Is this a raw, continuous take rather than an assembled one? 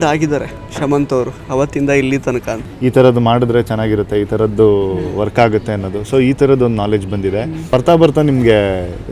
no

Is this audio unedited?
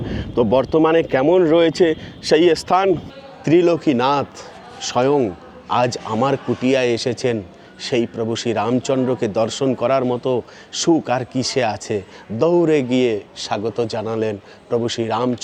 no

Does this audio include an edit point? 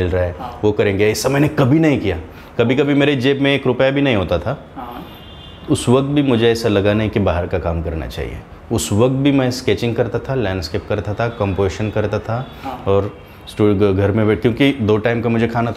no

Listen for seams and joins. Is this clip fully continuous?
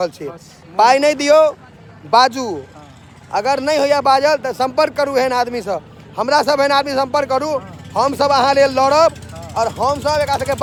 yes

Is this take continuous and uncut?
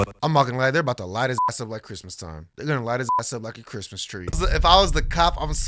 no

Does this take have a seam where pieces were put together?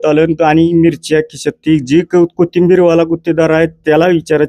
no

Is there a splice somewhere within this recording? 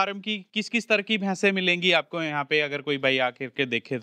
no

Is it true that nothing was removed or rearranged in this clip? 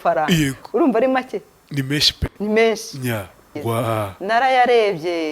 no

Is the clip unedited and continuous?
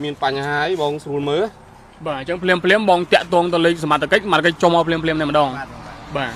yes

